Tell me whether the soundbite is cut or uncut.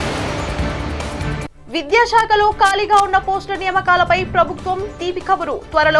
cut